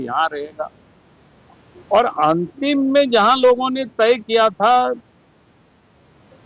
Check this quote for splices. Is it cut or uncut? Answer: uncut